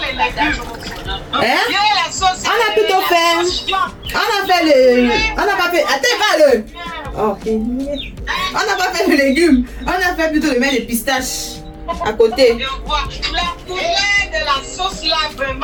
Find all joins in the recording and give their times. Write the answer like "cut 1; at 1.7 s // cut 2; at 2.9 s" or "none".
none